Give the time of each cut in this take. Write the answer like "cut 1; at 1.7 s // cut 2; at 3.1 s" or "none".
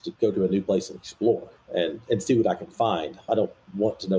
cut 1; at 1.6 s